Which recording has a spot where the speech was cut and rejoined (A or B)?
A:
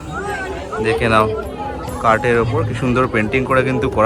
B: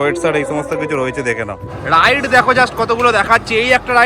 B